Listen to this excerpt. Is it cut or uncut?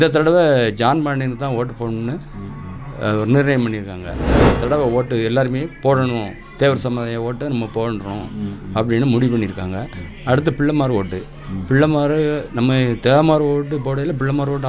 cut